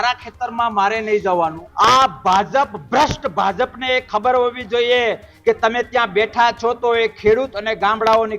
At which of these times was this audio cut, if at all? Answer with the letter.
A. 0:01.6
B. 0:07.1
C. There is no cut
A